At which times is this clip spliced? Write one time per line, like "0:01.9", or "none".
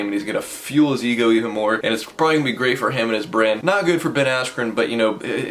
0:01.8
0:03.6